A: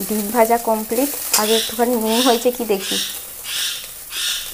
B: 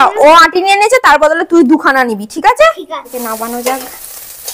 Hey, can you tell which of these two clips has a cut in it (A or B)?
B